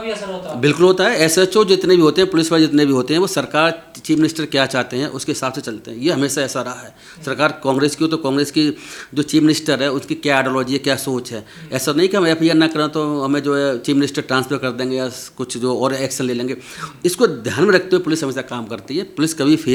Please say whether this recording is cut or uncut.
uncut